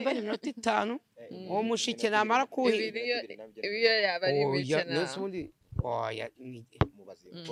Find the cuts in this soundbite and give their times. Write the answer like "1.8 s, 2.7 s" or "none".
none